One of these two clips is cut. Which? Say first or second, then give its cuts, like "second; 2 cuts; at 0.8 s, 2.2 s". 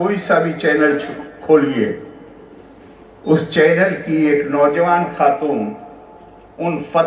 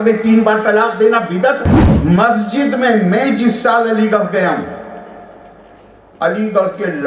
second; 1 cut; at 1.8 s